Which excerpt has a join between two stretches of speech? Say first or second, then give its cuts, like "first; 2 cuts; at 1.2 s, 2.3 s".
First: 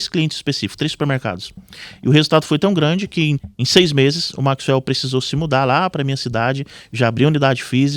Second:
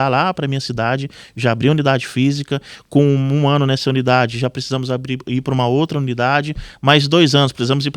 first; 1 cut; at 3.4 s